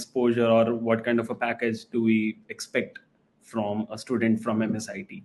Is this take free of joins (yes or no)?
yes